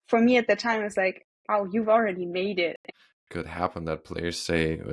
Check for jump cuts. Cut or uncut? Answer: cut